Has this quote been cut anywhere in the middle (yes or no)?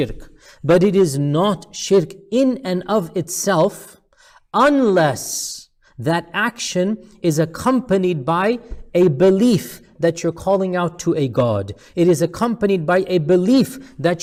no